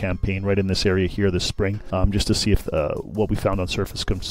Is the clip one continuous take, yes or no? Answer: no